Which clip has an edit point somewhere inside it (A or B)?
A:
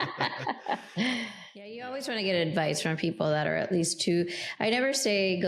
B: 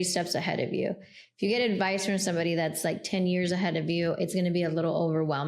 A